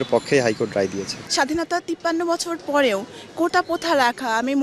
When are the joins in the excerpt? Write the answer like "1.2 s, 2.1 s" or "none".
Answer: 1.1 s